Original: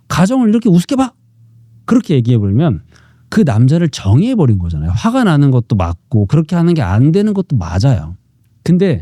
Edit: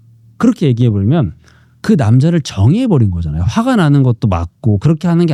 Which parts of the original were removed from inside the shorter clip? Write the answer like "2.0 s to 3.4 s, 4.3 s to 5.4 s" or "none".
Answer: none